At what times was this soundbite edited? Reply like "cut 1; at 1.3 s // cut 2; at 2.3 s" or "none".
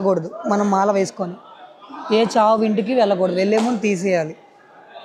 none

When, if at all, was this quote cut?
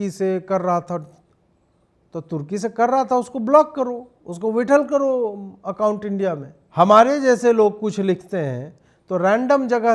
cut 1; at 6.5 s

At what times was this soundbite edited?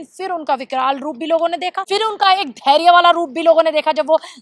cut 1; at 1.8 s

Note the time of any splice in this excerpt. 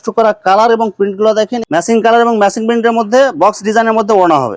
cut 1; at 1.7 s

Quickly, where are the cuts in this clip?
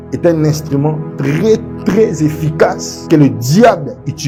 none

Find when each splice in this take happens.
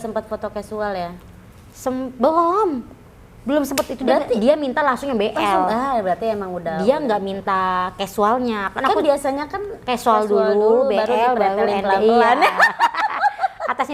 none

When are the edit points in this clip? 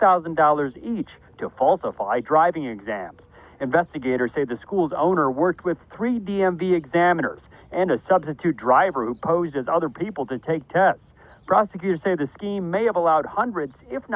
cut 1; at 10.1 s

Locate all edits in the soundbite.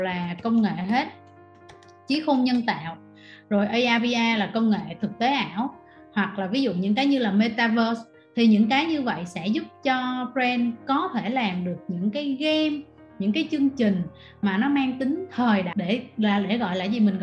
cut 1; at 15.7 s

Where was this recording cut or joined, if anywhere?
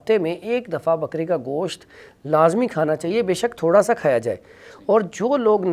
none

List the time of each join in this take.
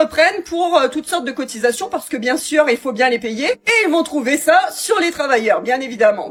none

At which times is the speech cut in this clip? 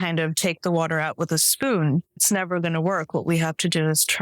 cut 1; at 2.2 s

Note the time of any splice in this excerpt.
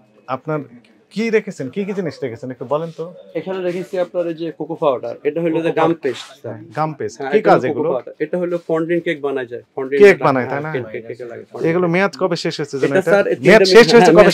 none

